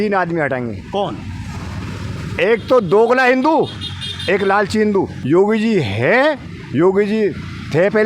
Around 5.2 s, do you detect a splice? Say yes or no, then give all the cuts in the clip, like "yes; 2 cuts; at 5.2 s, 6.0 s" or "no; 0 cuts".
yes; 1 cut; at 5.2 s